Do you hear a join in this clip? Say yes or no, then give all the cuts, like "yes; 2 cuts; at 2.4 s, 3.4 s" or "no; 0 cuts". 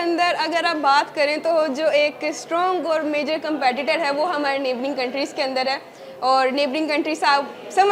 no; 0 cuts